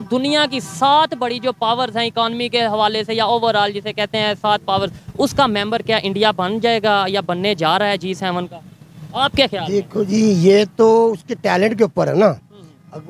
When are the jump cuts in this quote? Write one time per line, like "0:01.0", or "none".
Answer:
none